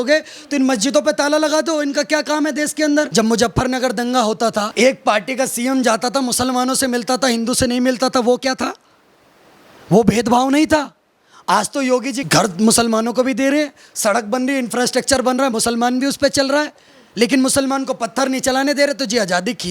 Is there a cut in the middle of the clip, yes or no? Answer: yes